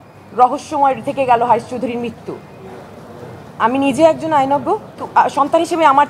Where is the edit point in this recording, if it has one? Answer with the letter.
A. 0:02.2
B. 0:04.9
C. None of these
B